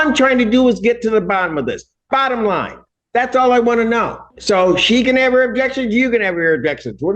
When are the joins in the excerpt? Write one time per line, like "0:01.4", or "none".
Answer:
0:04.2